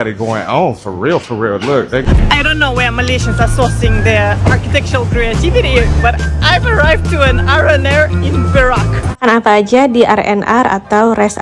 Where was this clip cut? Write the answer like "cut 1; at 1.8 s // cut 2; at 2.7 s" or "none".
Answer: cut 1; at 2.0 s // cut 2; at 9.2 s